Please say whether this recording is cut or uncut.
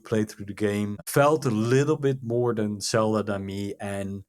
cut